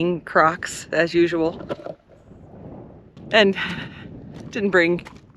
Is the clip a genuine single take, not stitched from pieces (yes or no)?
no